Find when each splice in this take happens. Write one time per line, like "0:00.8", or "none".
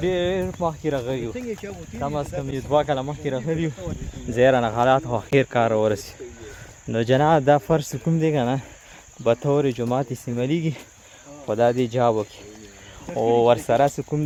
none